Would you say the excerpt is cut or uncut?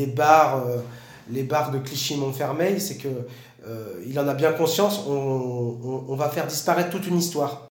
uncut